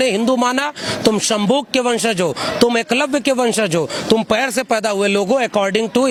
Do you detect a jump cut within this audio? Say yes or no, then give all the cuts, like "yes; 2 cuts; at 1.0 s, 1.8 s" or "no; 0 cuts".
no; 0 cuts